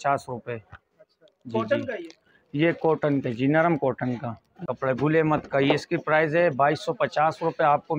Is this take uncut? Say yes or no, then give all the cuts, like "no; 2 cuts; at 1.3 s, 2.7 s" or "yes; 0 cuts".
no; 1 cut; at 4.6 s